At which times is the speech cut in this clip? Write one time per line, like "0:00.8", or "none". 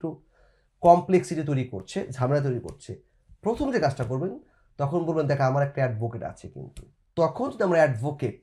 0:07.0

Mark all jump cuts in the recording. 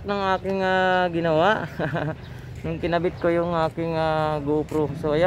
none

